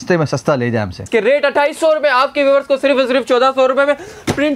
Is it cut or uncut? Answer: cut